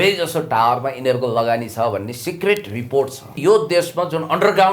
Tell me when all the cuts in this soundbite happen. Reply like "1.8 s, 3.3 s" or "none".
3.3 s

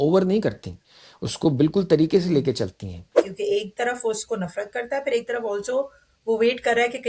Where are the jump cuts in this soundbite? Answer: 3.2 s

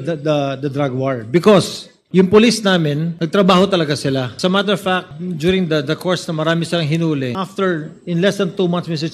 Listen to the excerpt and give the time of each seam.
2.0 s, 3.2 s, 4.3 s, 5.2 s, 7.4 s

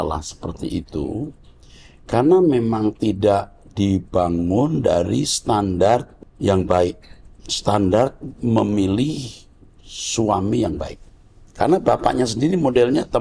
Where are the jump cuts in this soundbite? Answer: 6.2 s

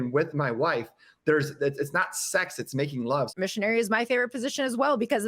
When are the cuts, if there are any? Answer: 3.3 s

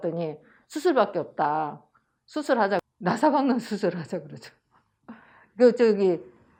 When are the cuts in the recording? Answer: none

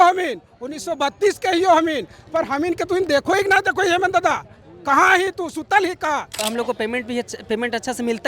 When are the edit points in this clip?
6.4 s

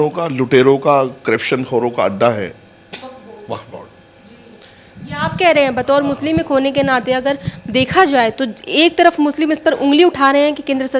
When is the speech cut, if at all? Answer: none

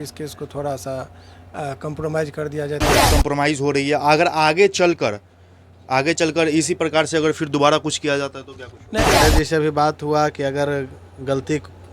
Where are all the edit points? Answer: 3.1 s, 9.2 s

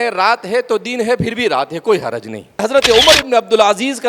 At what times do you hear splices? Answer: 2.6 s

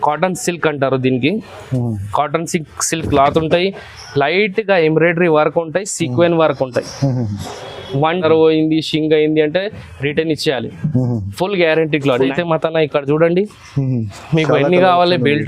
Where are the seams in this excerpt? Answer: 8.2 s, 12.3 s

